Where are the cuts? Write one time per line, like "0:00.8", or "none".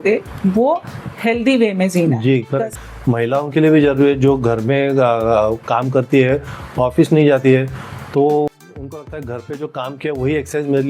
0:02.7